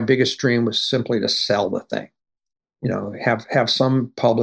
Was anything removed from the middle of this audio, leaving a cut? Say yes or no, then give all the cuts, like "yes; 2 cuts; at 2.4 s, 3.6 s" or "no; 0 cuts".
no; 0 cuts